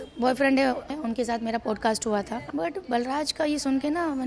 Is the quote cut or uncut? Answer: cut